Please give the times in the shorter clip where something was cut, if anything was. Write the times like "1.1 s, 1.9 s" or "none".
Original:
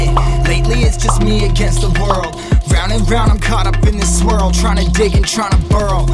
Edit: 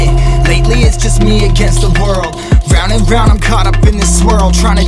none